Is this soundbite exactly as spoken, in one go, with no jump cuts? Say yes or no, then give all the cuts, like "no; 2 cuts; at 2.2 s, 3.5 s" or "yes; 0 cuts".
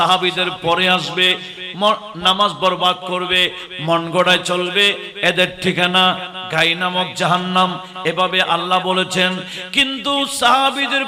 yes; 0 cuts